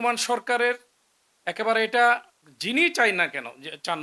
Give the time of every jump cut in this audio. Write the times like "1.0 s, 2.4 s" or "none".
none